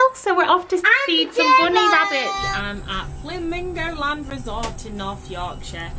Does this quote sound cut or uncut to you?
cut